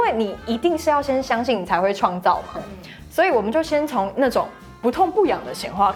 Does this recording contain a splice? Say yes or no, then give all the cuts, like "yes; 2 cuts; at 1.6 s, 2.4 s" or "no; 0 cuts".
no; 0 cuts